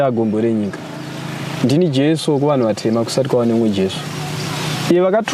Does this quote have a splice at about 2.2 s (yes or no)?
no